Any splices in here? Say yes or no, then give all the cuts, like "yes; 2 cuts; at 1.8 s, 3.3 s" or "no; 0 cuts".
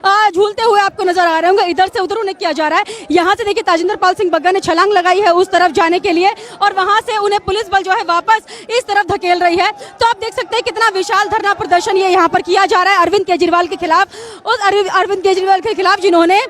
no; 0 cuts